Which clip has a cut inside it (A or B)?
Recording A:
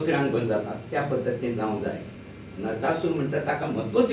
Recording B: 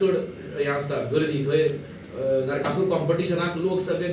A